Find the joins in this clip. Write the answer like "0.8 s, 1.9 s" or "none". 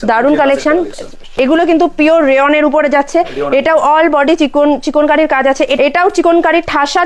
1.2 s, 5.7 s